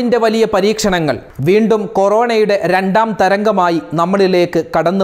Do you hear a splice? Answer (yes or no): yes